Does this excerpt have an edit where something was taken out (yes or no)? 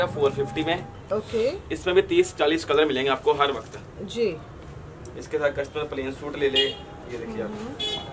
no